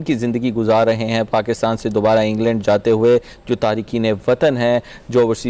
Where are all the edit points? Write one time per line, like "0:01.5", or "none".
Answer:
none